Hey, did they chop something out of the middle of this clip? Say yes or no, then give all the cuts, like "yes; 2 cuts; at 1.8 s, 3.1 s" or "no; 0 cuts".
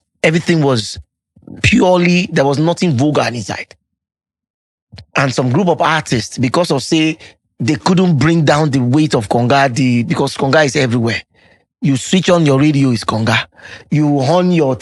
no; 0 cuts